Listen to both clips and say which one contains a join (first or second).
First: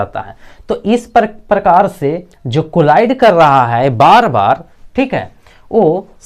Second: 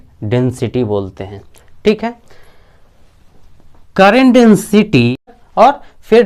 second